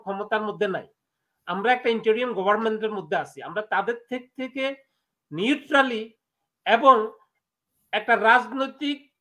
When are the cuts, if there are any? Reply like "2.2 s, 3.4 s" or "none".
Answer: none